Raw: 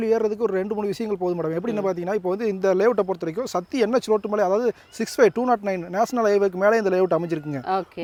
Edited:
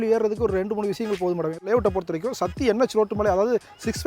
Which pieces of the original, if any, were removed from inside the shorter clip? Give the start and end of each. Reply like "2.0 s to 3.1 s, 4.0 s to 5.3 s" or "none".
1.7 s to 2.8 s